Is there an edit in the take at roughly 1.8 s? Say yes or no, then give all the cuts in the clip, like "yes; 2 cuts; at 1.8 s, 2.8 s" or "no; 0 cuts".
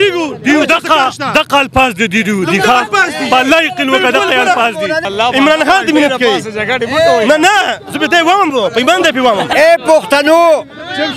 no; 2 cuts; at 5.0 s, 9.5 s